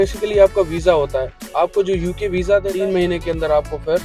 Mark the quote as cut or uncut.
cut